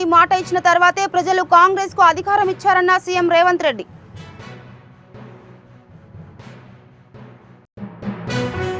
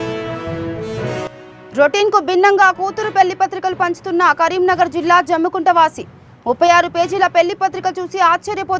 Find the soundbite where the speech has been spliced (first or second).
second